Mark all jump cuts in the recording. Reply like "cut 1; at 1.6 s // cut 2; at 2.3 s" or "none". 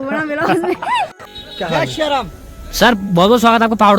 cut 1; at 1.3 s